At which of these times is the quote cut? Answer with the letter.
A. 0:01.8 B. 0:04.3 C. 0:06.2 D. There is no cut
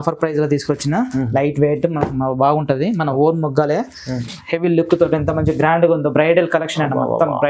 B